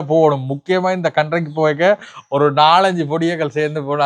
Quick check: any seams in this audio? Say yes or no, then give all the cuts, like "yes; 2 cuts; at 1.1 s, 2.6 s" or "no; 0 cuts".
no; 0 cuts